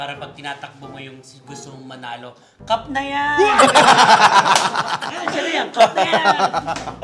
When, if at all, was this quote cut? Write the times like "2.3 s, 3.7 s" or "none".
none